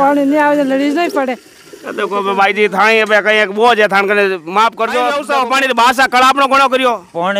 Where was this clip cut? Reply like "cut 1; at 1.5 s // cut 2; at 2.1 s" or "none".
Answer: cut 1; at 5.2 s